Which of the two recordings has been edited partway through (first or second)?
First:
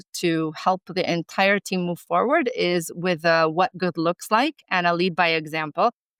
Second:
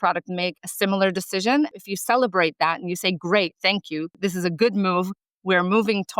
second